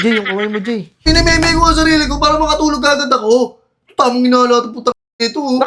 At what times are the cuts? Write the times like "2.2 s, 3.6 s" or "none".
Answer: 1.0 s

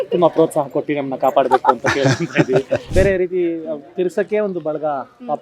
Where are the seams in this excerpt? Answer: 2.9 s

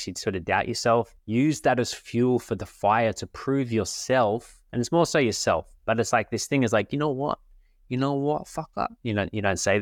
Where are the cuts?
1.2 s

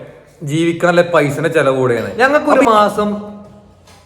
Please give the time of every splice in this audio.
2.1 s

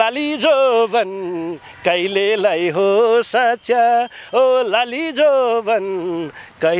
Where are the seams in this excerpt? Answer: none

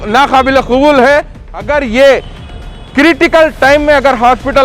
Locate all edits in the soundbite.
1.4 s

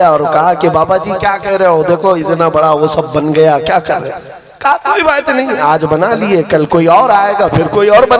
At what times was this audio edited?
none

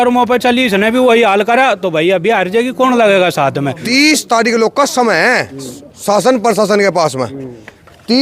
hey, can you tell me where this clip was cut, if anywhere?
3.8 s

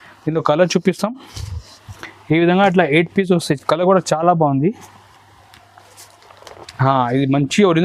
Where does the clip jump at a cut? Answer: 6.5 s

